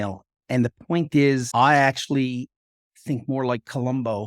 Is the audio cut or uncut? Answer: cut